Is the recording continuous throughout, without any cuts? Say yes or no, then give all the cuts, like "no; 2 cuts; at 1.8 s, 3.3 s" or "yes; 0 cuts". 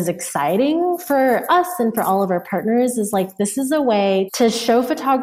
no; 1 cut; at 4.3 s